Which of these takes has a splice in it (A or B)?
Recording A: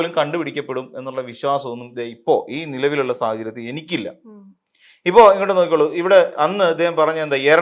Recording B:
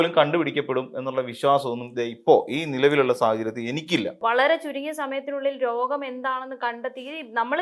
B